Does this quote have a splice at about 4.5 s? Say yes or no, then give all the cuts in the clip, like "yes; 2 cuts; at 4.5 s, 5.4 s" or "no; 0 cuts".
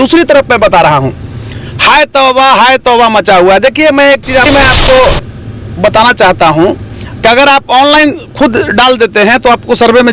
yes; 1 cut; at 4.5 s